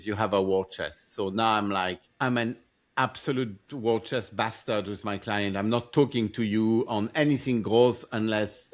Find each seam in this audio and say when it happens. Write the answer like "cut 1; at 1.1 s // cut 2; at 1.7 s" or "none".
cut 1; at 2.0 s